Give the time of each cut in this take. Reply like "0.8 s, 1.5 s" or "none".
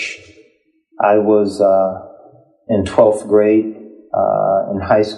none